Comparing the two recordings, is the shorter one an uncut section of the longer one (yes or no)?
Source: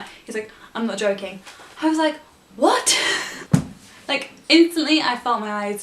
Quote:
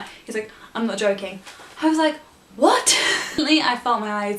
no